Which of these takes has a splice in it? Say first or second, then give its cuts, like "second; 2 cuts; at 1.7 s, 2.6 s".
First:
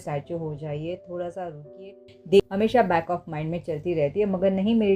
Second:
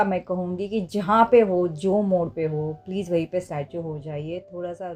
first; 1 cut; at 2.5 s